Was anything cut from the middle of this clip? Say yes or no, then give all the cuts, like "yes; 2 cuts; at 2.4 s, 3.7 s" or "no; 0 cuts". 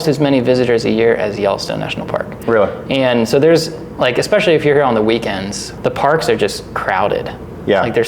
yes; 1 cut; at 5.6 s